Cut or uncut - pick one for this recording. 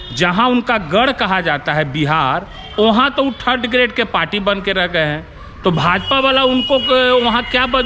uncut